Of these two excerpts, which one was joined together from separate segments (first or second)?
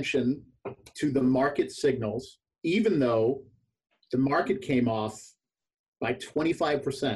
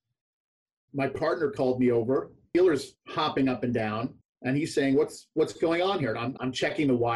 second